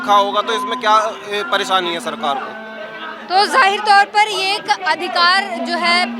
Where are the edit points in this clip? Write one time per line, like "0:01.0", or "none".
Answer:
none